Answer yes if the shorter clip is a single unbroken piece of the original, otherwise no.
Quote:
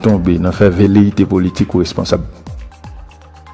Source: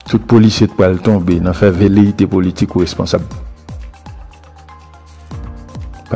no